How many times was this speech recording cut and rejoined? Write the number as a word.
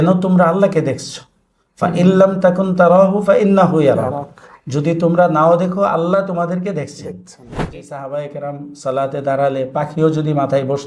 one